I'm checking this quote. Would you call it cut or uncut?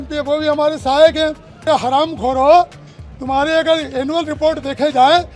cut